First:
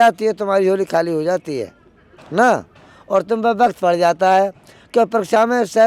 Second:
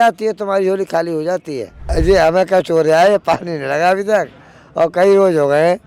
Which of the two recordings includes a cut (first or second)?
second